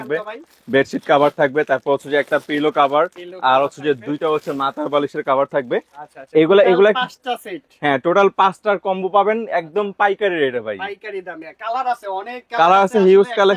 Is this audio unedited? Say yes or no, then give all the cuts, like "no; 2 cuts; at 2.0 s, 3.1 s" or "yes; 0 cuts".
yes; 0 cuts